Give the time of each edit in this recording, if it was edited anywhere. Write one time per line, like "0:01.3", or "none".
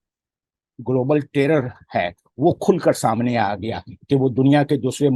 none